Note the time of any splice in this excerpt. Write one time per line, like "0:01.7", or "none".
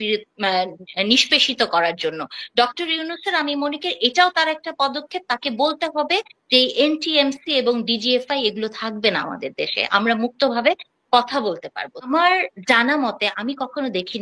0:12.1

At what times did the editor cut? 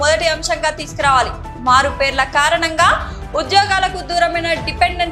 none

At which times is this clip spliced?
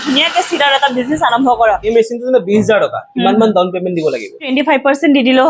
0:01.9
0:04.5

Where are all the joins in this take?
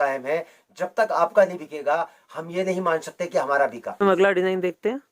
0:04.0

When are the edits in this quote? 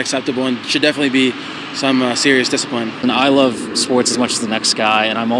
none

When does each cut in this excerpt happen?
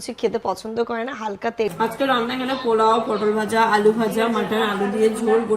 0:01.7

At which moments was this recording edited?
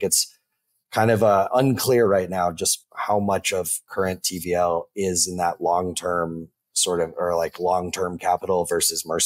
0:02.8

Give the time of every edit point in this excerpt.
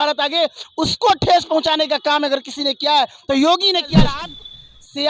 0:04.0

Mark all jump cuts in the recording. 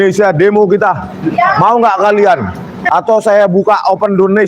0:02.7

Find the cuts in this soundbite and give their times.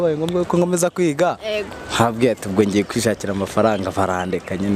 none

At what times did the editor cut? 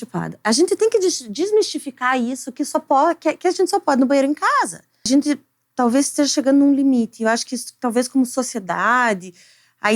0:05.1

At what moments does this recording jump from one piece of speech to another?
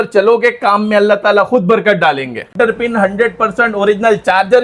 0:02.5

